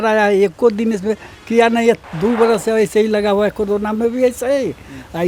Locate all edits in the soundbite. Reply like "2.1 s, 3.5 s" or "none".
none